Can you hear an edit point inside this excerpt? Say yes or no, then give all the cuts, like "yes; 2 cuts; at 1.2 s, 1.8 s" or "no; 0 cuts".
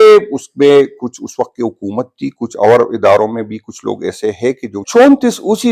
yes; 1 cut; at 4.8 s